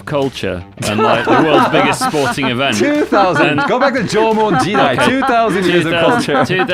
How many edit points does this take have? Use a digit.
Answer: 0